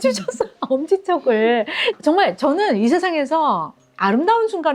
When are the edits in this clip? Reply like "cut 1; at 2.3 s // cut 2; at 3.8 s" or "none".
cut 1; at 1.8 s